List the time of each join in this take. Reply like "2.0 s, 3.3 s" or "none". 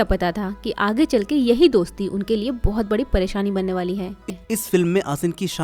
4.2 s